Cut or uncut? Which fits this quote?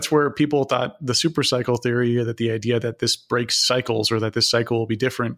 uncut